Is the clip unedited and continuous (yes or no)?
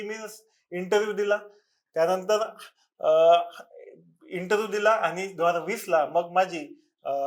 yes